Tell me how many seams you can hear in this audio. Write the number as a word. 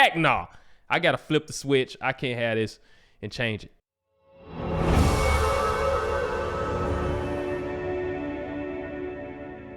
one